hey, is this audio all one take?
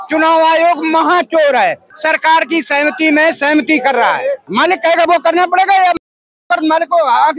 no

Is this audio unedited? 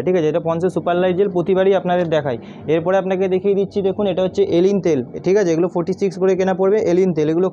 yes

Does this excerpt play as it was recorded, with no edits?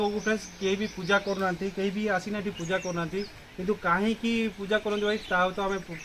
yes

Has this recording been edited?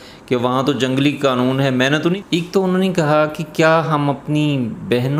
yes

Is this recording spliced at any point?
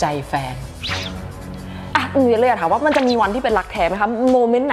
yes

